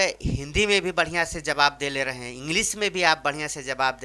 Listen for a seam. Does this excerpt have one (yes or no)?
no